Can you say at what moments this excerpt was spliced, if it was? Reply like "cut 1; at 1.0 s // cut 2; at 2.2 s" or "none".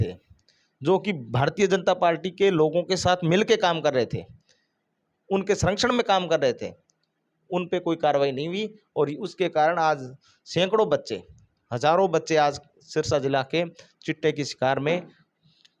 none